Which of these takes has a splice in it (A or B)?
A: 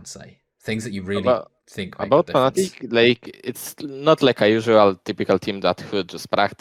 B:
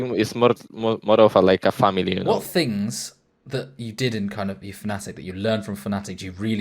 B